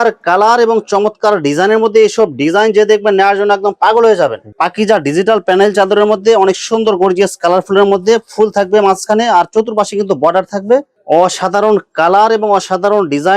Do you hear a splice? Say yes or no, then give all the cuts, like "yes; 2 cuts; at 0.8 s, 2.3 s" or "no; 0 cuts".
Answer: yes; 2 cuts; at 4.5 s, 10.9 s